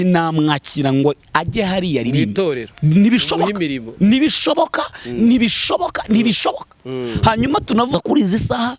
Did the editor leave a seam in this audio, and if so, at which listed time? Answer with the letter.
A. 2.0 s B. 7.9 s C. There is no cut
C